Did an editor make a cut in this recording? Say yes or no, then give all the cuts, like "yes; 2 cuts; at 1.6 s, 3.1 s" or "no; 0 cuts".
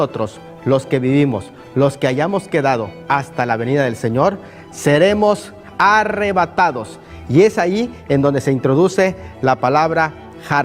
no; 0 cuts